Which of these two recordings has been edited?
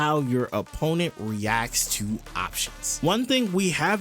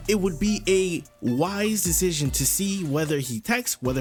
first; 1 cut; at 2.8 s

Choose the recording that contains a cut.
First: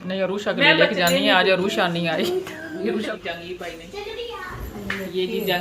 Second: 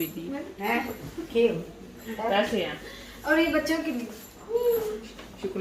first; 1 cut; at 3.1 s

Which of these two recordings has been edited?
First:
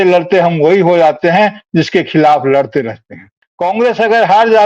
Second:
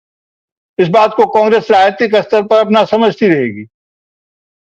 first; 1 cut; at 3.5 s

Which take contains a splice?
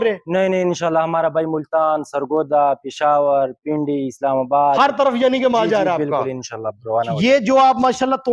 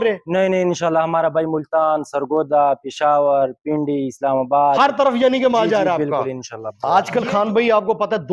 second; 1 cut; at 6.8 s

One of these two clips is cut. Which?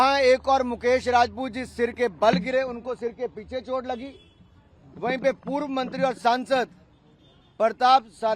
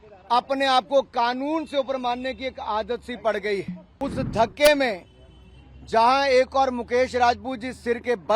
second; 1 cut; at 3.8 s

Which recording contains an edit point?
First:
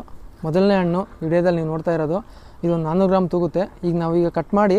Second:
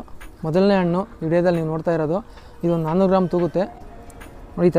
second; 1 cut; at 3.7 s

